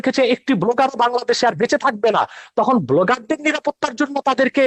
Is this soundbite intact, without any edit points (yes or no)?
yes